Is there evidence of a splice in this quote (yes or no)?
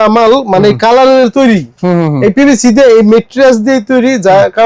no